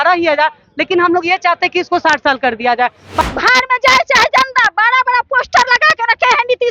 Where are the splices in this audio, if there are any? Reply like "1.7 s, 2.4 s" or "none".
3.2 s